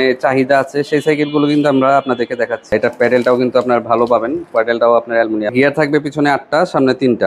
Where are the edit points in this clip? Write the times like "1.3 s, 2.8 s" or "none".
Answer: 2.7 s, 5.5 s